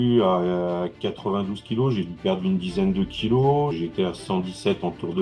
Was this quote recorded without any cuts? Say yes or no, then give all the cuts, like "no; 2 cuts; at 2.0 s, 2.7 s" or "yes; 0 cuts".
no; 1 cut; at 3.7 s